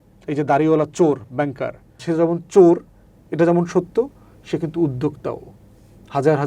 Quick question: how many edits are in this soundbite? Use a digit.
1